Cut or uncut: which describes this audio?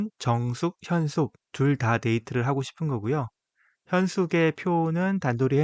cut